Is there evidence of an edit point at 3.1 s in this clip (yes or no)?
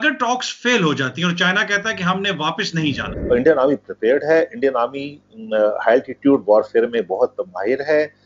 yes